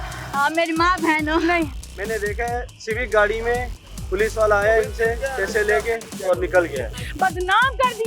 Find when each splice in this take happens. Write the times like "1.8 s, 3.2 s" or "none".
1.9 s, 7.0 s

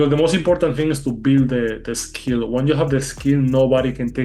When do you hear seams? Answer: none

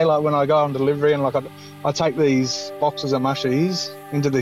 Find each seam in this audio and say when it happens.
none

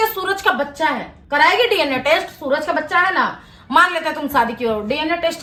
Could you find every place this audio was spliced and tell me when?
none

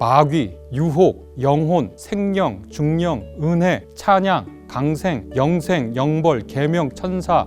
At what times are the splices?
1.1 s, 2.0 s, 3.9 s, 5.2 s

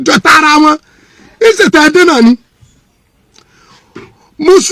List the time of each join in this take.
none

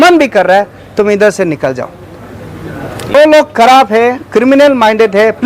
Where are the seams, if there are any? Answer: 3.1 s

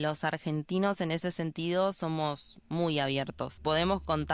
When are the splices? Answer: 3.5 s

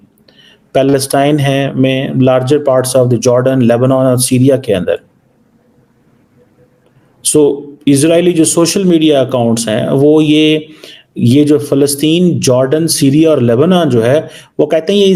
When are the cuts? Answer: none

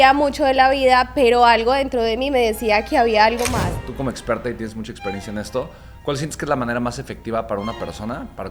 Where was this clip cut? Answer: 3.9 s

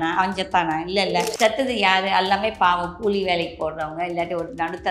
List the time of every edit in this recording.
1.2 s

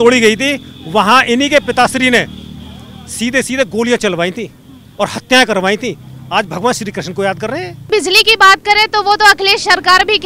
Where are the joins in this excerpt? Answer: 7.9 s

